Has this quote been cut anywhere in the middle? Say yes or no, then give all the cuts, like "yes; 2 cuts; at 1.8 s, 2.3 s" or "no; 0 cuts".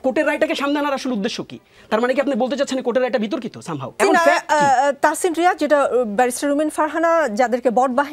yes; 1 cut; at 3.9 s